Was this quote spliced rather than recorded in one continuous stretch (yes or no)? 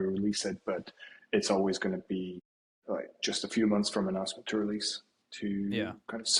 no